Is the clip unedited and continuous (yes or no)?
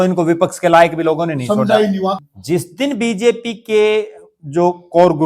no